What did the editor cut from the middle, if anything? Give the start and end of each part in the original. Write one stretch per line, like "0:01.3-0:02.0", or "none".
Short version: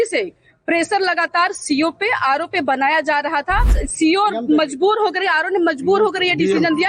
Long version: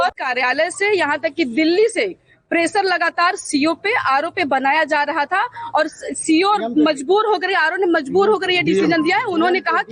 0:05.6-0:06.0